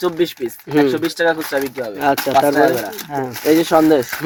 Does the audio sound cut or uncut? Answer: uncut